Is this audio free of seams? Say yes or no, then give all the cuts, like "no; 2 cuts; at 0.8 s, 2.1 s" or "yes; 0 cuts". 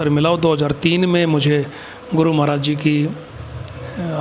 yes; 0 cuts